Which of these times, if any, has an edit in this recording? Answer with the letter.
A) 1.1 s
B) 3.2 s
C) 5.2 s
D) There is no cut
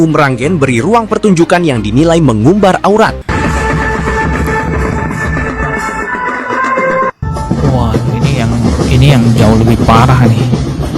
B